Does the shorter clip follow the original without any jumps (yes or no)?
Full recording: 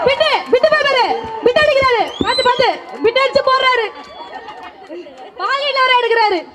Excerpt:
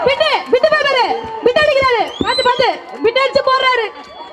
yes